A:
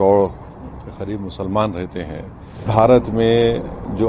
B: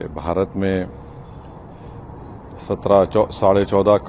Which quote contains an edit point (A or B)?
A